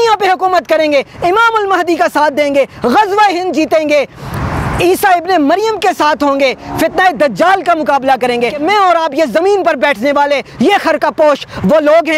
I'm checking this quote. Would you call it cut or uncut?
cut